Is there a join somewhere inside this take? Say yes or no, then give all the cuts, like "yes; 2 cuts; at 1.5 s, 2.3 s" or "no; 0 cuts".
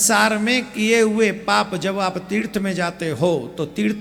no; 0 cuts